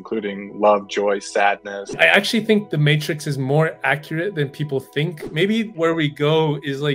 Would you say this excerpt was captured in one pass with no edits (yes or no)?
no